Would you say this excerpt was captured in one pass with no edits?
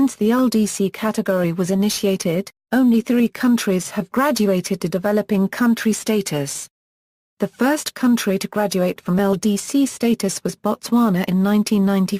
no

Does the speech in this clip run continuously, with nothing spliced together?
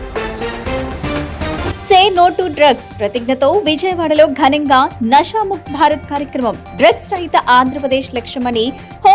no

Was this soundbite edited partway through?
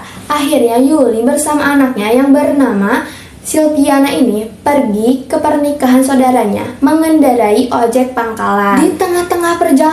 yes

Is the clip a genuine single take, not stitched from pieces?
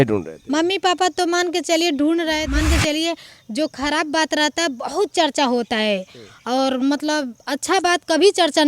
no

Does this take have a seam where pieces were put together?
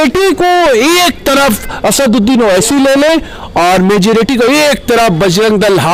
no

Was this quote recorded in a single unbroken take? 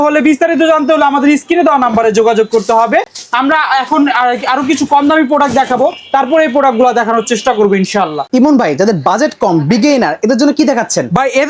yes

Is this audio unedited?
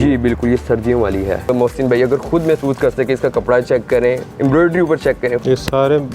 no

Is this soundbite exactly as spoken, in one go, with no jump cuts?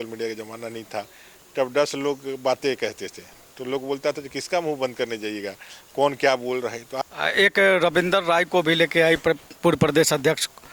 no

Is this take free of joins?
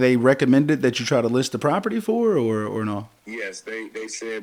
yes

